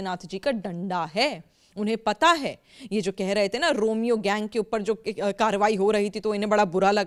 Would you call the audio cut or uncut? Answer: uncut